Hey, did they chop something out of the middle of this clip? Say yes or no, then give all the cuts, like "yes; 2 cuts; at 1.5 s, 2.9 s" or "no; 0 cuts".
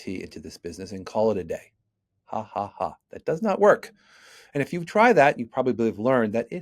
no; 0 cuts